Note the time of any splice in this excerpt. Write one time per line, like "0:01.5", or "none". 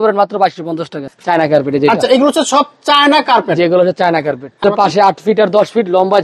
0:01.0
0:04.6

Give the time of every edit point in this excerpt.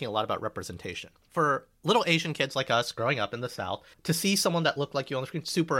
0:01.2
0:03.9

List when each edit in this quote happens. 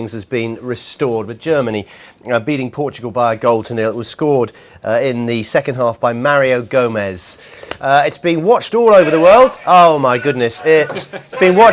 0:03.0

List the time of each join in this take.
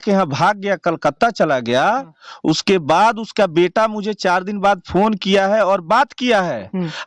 none

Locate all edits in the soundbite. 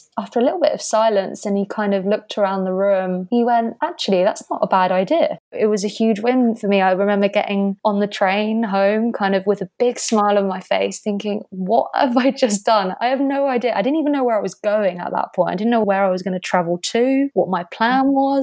0:05.5
0:15.8

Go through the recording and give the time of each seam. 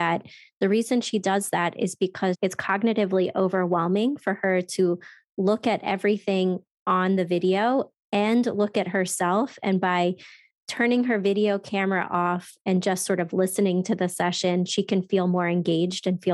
none

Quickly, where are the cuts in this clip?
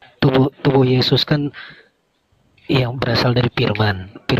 none

